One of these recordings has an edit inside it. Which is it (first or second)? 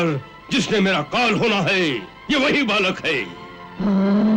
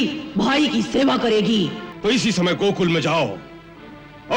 second